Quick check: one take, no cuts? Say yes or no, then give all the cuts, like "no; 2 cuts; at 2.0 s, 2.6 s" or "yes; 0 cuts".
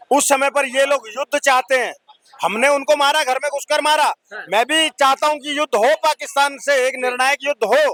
yes; 0 cuts